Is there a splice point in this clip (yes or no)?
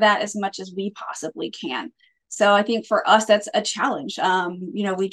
no